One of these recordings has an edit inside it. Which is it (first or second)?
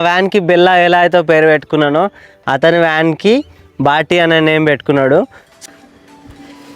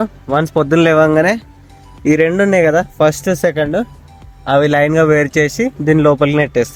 first